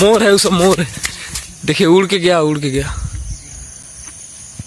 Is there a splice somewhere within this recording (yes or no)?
no